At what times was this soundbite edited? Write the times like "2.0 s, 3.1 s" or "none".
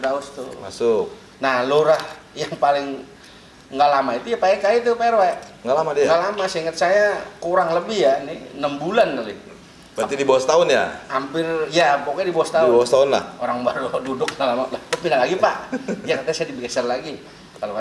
none